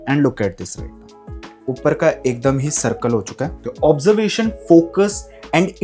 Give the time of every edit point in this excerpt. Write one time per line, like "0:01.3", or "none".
0:03.6